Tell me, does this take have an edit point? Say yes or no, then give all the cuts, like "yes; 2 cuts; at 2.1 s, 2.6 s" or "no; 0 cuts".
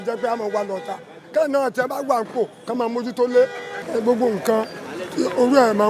no; 0 cuts